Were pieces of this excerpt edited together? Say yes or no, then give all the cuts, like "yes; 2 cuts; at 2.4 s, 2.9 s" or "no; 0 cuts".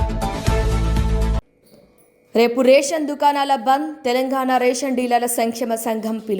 yes; 1 cut; at 1.4 s